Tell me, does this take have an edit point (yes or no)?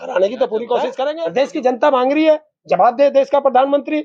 yes